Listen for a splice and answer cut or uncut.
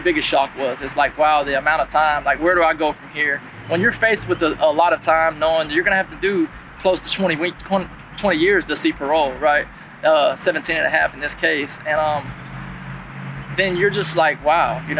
uncut